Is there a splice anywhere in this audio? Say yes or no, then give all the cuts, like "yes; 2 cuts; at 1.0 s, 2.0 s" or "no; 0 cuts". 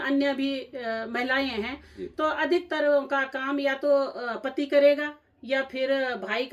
no; 0 cuts